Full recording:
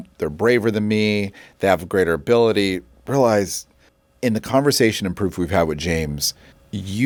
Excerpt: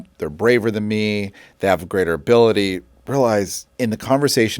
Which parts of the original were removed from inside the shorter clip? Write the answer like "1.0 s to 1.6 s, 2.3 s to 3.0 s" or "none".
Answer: 3.6 s to 4.0 s